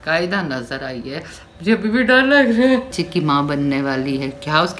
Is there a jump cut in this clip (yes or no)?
yes